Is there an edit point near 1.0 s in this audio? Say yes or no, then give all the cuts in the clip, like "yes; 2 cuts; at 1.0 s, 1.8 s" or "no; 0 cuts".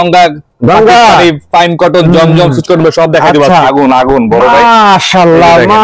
no; 1 cut; at 3.6 s